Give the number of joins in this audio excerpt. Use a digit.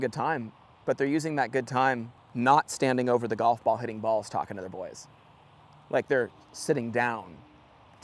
1